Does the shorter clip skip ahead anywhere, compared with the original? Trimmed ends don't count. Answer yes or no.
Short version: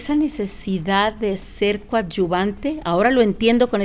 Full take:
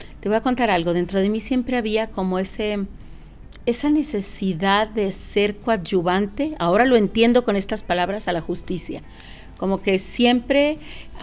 no